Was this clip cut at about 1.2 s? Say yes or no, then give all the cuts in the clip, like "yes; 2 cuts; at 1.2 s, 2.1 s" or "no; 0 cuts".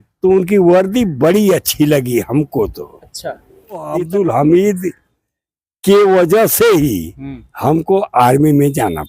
no; 1 cut; at 3.9 s